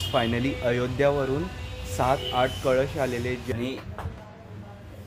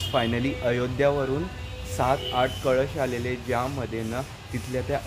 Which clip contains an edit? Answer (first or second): first